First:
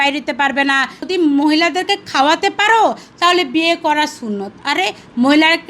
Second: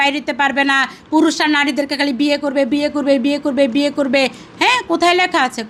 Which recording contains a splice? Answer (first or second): first